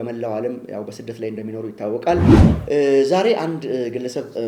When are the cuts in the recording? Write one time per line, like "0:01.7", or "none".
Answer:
0:02.4